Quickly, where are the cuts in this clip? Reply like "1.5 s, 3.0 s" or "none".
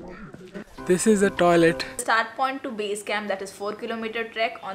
2.0 s